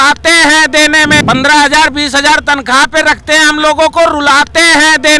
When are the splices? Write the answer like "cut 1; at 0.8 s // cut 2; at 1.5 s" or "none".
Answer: cut 1; at 1.2 s